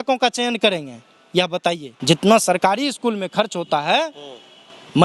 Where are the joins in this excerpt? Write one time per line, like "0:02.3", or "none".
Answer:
0:01.9